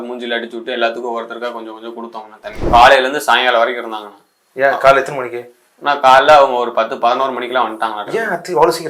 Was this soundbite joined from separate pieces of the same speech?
yes; 1 cut; at 2.7 s

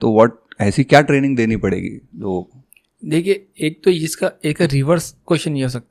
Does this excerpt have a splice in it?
no; 0 cuts

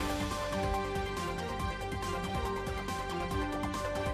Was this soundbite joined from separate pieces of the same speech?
no; 0 cuts

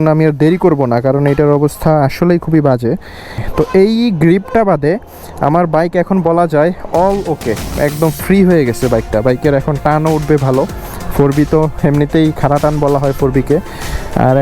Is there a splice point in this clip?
yes; 2 cuts; at 3.4 s, 7.7 s

